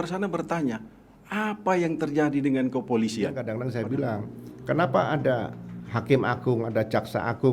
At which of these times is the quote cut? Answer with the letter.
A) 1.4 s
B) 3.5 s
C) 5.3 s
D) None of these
B